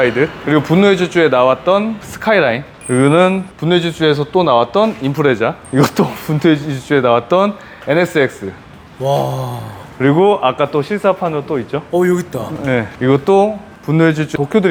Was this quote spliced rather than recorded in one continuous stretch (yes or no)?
no